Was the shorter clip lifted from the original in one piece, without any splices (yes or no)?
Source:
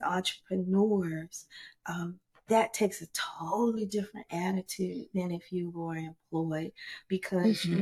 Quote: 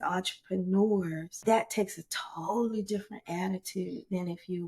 no